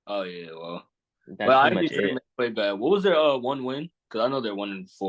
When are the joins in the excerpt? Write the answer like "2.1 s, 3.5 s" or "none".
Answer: none

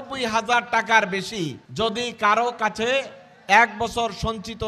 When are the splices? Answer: 1.6 s

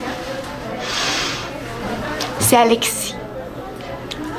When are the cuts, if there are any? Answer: none

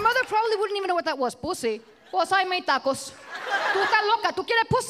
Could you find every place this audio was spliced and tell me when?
1.9 s, 3.7 s

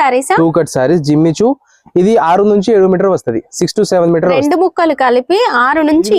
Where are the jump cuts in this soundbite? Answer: none

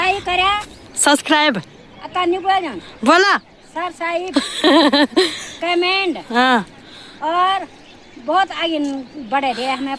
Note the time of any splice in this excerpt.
none

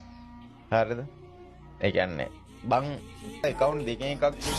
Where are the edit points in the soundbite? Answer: 3.4 s

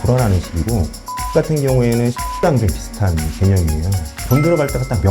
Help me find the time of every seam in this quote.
2.4 s, 4.2 s

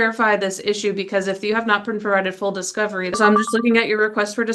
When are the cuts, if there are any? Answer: 3.1 s

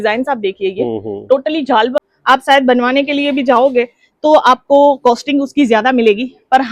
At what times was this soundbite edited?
2.1 s

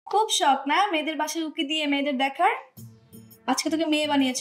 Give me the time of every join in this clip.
none

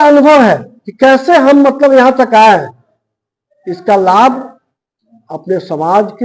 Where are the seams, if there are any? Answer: none

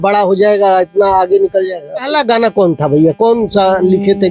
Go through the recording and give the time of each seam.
2.1 s

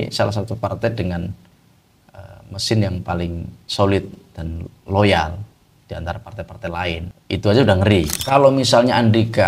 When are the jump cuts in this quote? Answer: 7.1 s, 8.2 s

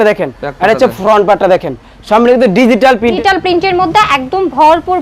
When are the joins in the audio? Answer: 3.2 s

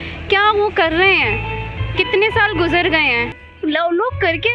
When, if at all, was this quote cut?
3.4 s

